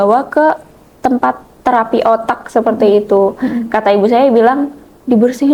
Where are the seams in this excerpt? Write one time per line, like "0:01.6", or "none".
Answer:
none